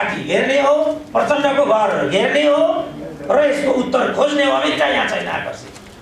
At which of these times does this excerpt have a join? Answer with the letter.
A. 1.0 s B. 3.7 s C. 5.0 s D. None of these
A